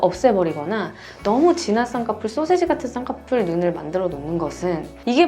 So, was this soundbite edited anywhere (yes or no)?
no